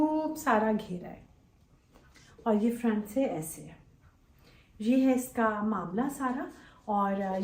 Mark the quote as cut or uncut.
uncut